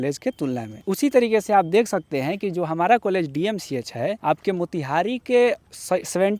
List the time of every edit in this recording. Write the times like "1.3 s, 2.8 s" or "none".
none